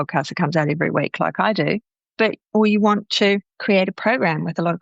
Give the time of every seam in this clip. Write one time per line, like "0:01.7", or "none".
0:03.5